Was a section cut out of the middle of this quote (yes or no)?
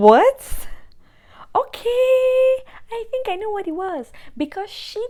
no